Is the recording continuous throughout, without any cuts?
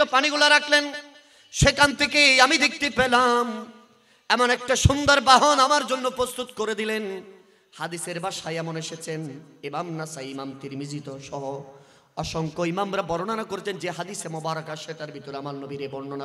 yes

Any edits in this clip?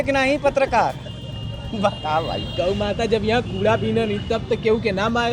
no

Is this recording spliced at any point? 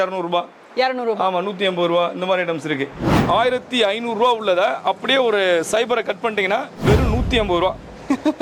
yes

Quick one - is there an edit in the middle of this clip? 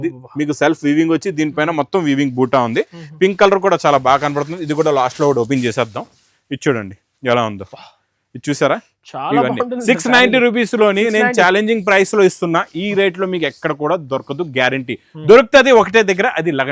no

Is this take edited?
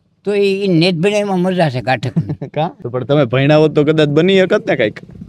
no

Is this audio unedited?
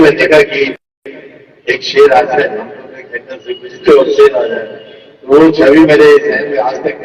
yes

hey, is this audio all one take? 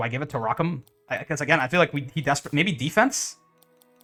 yes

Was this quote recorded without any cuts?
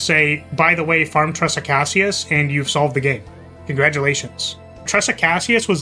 no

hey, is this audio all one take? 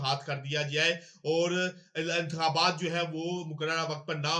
yes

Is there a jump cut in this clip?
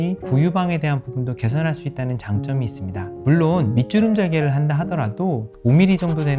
yes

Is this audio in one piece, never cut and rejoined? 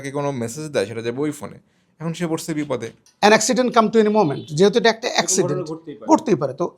no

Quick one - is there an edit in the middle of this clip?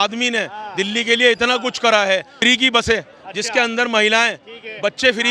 yes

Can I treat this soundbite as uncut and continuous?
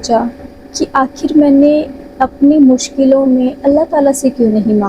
yes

